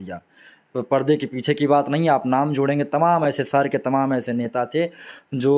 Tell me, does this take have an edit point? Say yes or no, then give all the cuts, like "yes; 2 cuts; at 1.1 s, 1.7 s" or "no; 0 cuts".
no; 0 cuts